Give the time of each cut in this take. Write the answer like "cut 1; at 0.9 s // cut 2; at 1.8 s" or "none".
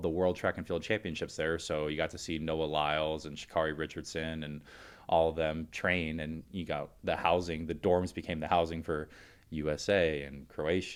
none

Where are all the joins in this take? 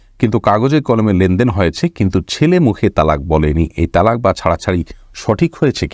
none

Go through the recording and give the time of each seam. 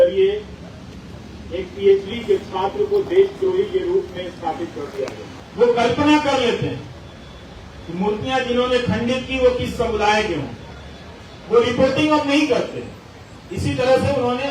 cut 1; at 5.3 s

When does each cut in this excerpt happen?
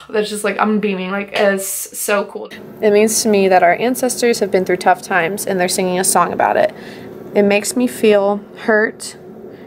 cut 1; at 2.3 s

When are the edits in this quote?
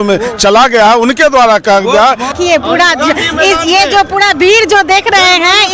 cut 1; at 2.3 s

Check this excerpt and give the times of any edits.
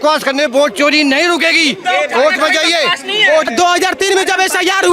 cut 1; at 3.5 s

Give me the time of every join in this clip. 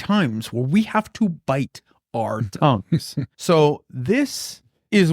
cut 1; at 3.3 s

